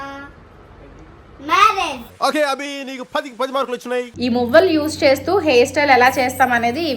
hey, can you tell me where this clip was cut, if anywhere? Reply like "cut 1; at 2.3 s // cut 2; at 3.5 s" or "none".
cut 1; at 4.1 s